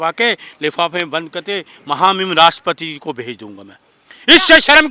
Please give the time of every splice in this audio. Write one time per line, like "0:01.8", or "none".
none